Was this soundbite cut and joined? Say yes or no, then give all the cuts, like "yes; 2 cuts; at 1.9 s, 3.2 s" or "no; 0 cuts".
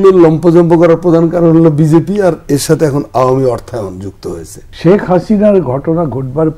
yes; 1 cut; at 4.6 s